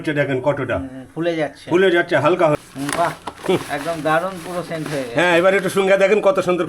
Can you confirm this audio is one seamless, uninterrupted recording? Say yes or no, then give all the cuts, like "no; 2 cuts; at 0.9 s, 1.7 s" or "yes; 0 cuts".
no; 1 cut; at 2.7 s